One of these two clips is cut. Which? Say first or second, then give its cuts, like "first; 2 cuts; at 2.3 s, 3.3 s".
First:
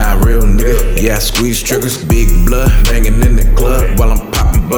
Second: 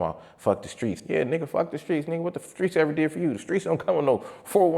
second; 1 cut; at 1.0 s